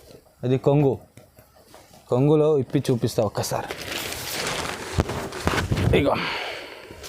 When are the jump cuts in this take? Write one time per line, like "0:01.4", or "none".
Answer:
none